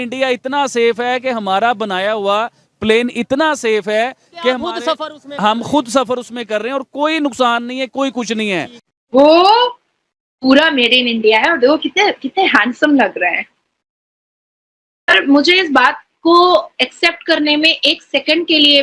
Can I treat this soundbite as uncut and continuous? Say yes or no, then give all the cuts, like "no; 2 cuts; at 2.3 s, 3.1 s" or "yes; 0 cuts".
no; 1 cut; at 9.0 s